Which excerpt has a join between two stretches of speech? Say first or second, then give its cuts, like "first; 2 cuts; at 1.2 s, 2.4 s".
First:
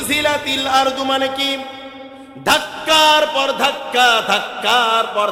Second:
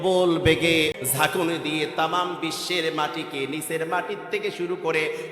second; 1 cut; at 1.0 s